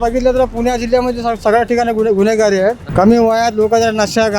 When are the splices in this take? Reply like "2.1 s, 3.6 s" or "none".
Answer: 2.8 s